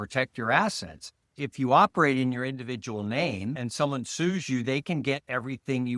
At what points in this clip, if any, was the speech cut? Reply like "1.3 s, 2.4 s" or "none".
1.4 s